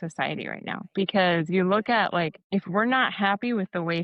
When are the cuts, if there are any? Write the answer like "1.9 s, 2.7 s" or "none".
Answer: none